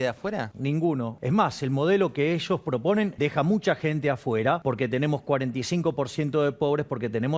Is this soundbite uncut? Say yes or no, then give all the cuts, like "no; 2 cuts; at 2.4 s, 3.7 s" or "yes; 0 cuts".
no; 3 cuts; at 1.0 s, 3.1 s, 4.6 s